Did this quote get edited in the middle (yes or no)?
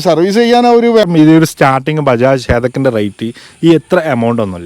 yes